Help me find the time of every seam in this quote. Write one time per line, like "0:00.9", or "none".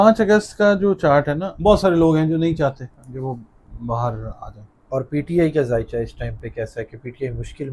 0:01.4